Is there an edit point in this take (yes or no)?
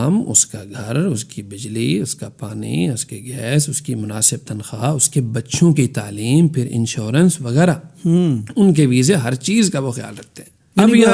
no